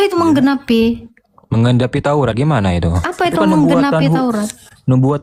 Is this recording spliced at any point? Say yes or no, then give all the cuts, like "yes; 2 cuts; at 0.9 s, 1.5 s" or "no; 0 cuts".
no; 0 cuts